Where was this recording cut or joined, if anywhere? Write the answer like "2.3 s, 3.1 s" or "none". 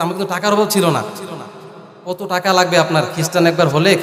none